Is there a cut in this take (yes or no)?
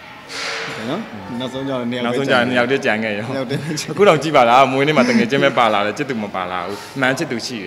no